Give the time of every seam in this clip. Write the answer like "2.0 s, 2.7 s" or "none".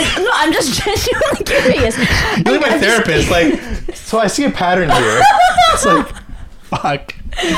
none